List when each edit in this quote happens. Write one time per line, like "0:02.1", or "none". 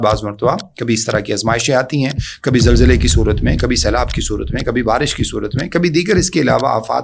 none